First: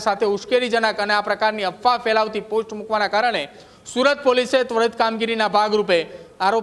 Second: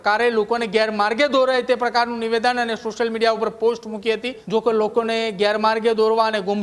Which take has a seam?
second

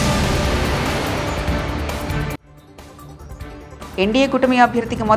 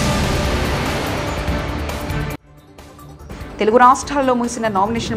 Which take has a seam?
first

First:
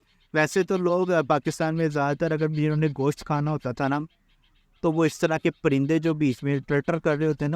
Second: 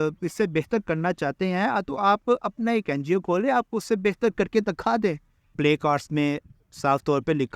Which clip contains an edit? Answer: second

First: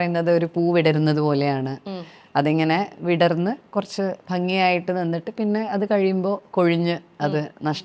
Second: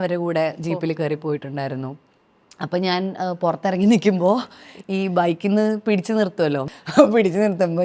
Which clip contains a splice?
second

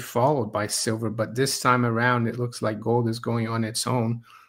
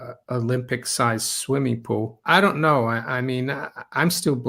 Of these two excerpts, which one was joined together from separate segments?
second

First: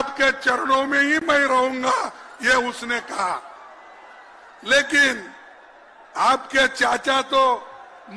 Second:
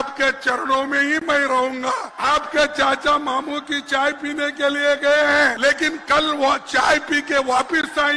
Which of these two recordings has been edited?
second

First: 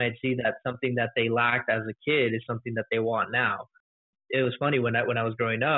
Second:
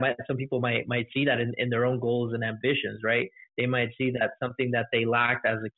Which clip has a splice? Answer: first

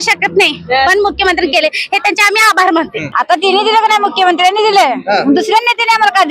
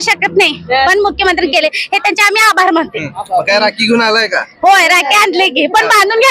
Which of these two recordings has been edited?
first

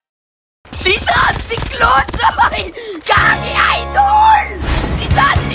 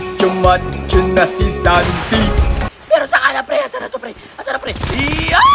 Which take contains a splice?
second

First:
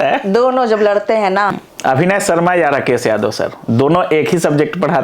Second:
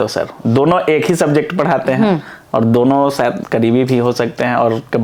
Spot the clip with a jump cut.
first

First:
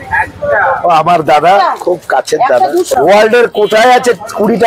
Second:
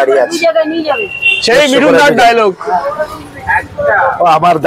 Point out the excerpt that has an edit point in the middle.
first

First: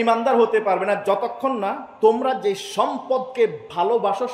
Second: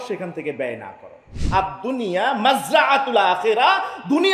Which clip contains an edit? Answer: second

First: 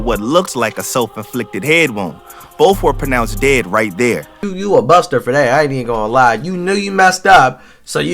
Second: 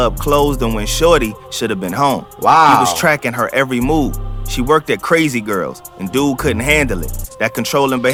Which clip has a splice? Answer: first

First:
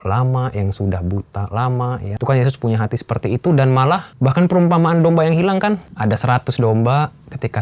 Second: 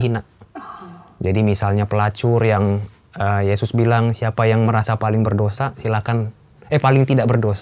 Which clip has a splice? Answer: first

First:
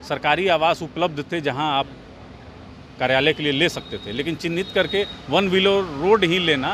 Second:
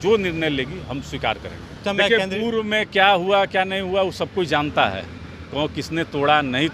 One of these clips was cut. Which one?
second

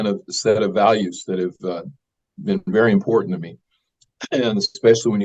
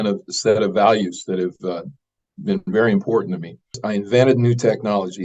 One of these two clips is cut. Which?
second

